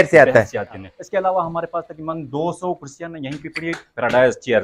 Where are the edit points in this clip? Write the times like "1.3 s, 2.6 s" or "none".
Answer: 0.9 s